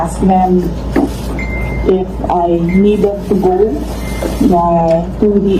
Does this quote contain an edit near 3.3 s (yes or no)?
no